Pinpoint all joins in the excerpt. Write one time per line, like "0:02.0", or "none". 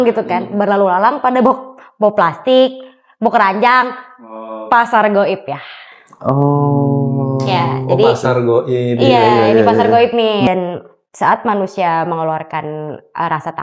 0:10.5